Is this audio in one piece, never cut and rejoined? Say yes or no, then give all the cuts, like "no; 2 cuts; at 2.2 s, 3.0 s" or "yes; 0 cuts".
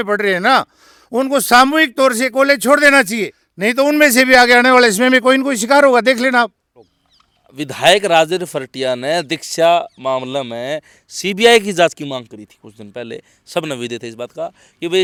yes; 0 cuts